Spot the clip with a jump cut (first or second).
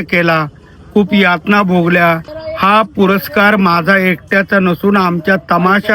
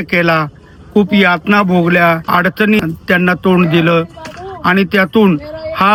first